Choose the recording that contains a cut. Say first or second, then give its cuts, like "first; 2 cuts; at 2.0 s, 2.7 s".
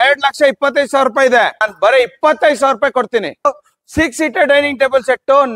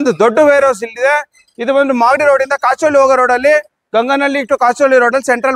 first; 2 cuts; at 1.7 s, 3.7 s